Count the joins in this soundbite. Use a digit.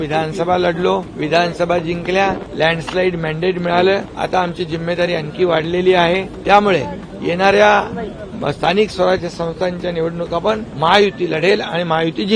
5